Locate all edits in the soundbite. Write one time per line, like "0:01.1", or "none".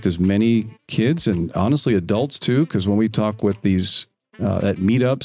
none